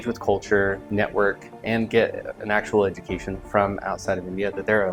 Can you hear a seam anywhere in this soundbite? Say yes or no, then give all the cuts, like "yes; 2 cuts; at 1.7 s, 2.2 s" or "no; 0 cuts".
no; 0 cuts